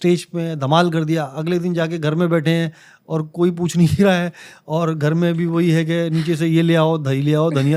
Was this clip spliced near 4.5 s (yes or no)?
no